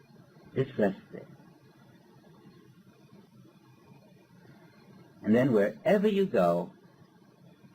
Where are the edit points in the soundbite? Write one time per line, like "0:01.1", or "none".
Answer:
0:03.3